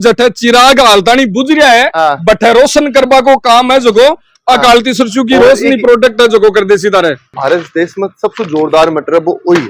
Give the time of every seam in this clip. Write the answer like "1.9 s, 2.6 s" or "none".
7.3 s